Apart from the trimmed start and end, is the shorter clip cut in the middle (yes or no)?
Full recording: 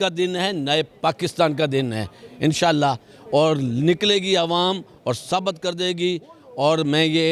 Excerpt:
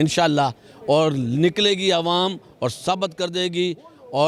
no